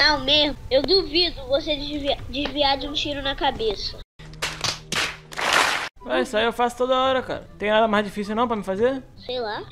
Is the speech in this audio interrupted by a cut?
yes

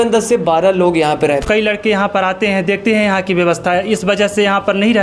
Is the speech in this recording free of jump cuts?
no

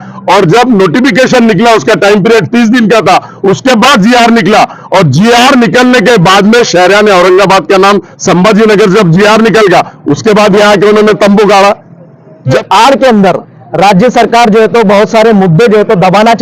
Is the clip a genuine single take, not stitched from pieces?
no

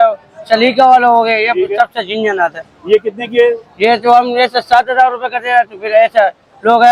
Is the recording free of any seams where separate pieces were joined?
yes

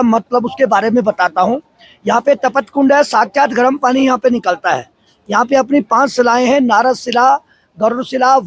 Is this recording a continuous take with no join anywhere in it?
yes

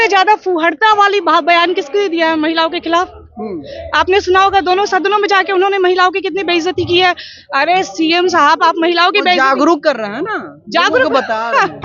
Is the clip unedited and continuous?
yes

